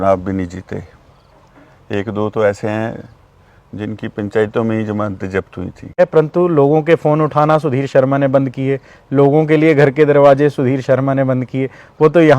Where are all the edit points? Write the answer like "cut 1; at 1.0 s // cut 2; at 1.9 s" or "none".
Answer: cut 1; at 6.0 s